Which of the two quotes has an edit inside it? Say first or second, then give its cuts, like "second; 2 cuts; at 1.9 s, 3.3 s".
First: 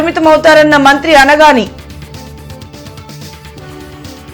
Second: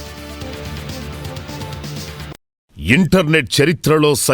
second; 1 cut; at 2.6 s